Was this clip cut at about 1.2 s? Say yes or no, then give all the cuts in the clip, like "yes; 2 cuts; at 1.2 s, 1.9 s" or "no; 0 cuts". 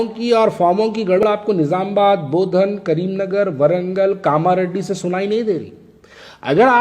yes; 1 cut; at 1.2 s